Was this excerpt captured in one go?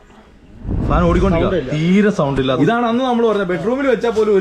no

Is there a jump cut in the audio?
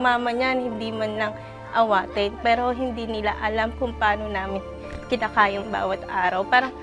no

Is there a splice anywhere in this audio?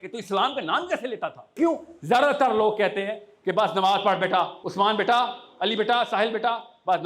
yes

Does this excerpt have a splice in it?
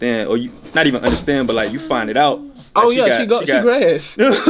no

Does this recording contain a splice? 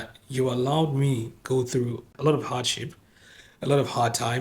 yes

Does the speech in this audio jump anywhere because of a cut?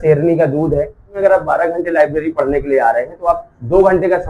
yes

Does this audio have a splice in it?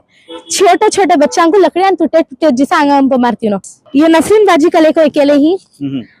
yes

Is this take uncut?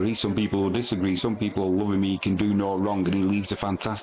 yes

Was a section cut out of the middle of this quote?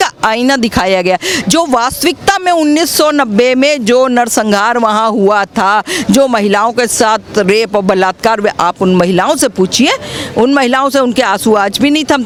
no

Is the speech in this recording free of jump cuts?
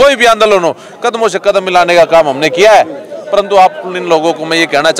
yes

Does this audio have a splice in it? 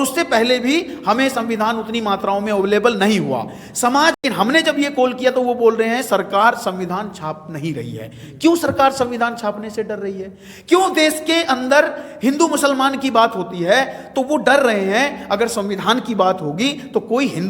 yes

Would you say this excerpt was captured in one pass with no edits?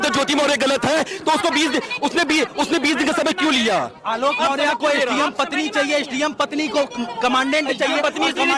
yes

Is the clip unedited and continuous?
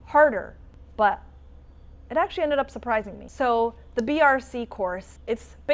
yes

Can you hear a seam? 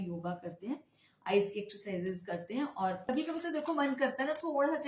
yes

